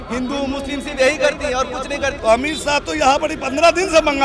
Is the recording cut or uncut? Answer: cut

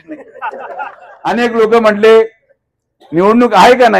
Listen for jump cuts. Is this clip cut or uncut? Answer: cut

